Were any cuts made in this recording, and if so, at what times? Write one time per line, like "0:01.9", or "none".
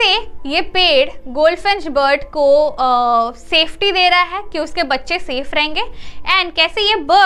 none